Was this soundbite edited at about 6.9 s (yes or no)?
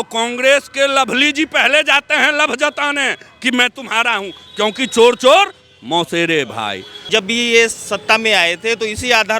yes